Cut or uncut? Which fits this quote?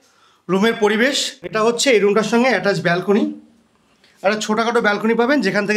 cut